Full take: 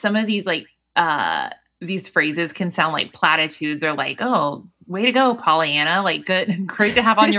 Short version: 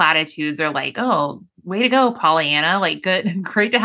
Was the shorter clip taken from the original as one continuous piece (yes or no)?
yes